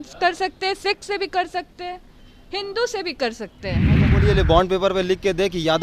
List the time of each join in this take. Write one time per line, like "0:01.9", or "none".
0:04.0